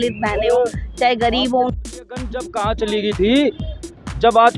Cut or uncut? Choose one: cut